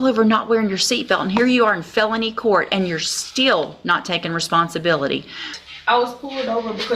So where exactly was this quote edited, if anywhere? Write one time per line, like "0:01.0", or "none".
0:05.6